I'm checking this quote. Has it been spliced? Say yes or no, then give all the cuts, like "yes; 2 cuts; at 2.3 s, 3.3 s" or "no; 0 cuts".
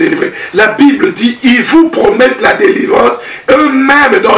no; 0 cuts